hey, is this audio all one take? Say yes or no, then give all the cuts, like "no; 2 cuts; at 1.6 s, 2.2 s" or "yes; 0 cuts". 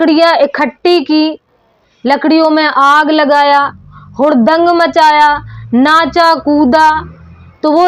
yes; 0 cuts